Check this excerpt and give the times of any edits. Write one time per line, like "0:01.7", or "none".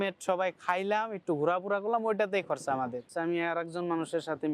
0:03.0